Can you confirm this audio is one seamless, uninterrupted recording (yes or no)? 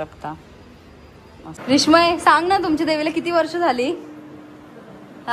no